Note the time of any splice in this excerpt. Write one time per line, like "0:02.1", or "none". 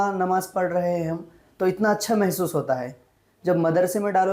none